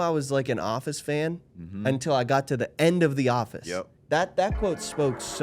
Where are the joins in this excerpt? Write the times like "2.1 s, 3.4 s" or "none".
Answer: 3.9 s